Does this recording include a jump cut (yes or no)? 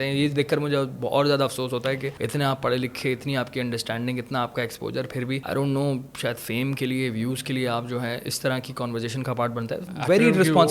yes